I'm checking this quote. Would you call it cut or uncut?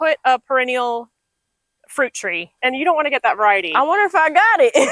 cut